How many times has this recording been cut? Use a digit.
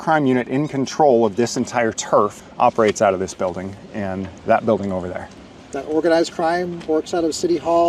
0